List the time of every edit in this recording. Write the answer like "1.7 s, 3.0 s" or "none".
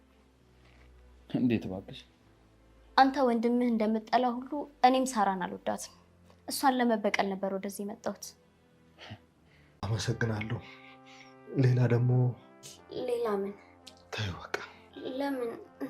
9.9 s